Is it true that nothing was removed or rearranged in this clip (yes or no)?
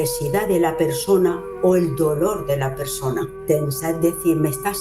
no